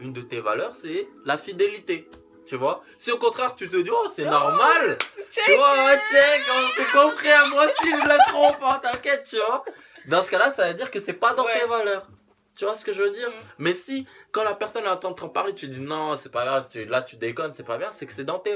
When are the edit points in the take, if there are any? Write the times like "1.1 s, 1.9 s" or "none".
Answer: none